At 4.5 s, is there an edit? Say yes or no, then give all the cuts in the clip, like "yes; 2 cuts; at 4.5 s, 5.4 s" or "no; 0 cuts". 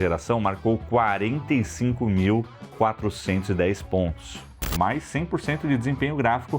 yes; 1 cut; at 4.5 s